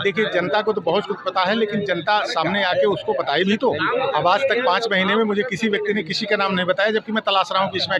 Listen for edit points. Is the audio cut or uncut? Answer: uncut